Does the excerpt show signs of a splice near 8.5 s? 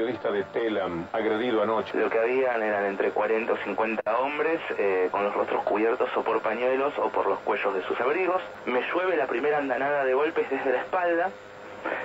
yes; 2 cuts; at 1.9 s, 8.5 s

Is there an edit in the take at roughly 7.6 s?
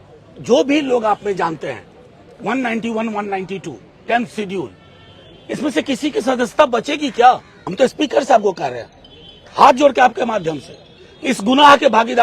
yes; 1 cut; at 7.6 s

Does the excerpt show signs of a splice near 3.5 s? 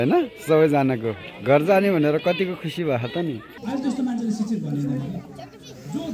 yes; 1 cut; at 3.5 s

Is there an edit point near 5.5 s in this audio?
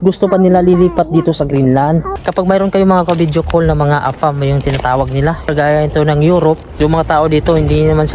yes; 3 cuts; at 2.1 s, 5.5 s, 6.7 s

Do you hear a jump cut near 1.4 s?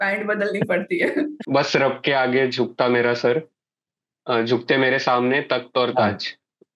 yes; 1 cut; at 1.4 s

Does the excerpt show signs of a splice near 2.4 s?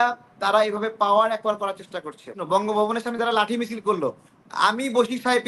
yes; 1 cut; at 2.4 s

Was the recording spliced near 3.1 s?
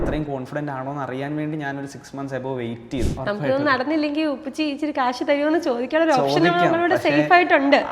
yes; 1 cut; at 3.1 s

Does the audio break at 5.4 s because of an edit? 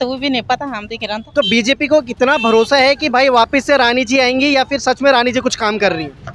no; 1 cut; at 1.2 s

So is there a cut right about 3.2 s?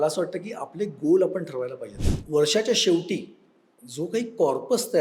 no; 1 cut; at 2.0 s

